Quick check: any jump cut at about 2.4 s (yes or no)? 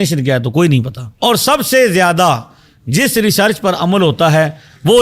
no